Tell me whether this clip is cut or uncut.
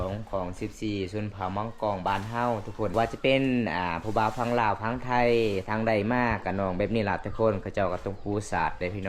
cut